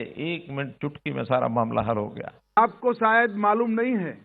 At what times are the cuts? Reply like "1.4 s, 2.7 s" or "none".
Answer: 2.6 s